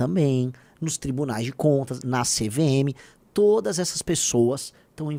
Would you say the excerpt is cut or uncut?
uncut